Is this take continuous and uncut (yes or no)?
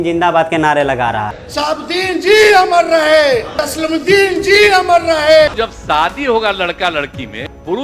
no